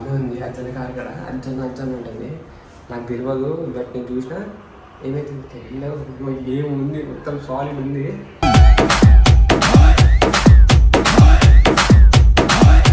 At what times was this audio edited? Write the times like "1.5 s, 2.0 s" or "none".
none